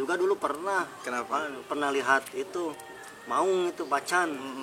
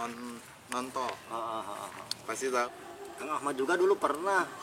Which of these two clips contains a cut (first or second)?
second